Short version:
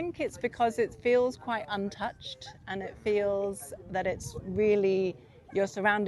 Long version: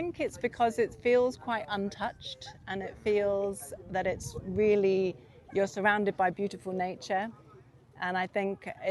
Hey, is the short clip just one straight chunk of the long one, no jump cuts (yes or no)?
yes